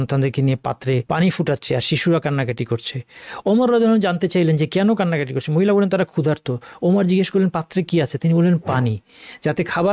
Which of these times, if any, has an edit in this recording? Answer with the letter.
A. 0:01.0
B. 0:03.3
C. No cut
A